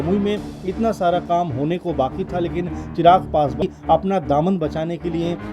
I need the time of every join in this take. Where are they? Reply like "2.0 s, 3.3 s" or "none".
3.5 s